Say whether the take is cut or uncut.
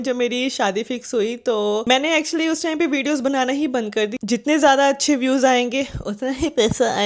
cut